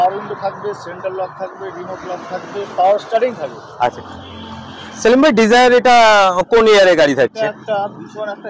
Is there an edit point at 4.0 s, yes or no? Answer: yes